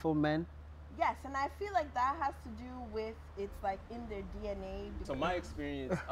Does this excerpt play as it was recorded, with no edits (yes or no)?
no